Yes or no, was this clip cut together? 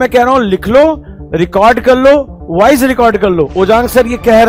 no